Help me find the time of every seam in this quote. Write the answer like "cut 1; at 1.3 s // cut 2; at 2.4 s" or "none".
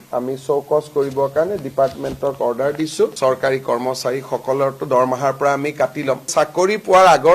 cut 1; at 6.3 s